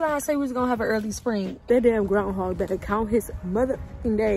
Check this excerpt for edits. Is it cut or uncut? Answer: cut